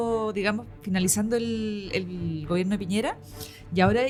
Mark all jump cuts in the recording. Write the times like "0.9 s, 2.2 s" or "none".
none